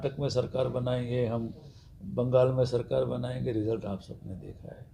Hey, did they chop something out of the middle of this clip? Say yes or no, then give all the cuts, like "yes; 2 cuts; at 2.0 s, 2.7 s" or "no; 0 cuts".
no; 0 cuts